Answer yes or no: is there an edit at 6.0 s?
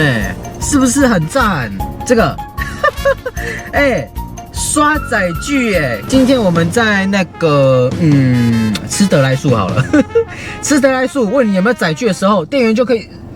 yes